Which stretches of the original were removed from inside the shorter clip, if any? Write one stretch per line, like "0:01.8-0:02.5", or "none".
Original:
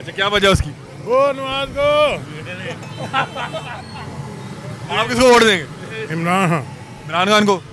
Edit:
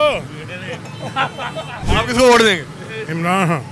0:03.8-0:04.8